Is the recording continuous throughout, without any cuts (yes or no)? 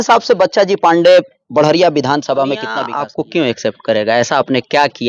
no